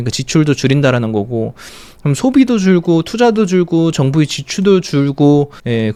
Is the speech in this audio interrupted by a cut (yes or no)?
no